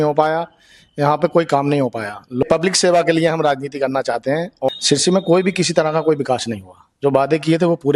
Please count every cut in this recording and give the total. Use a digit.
2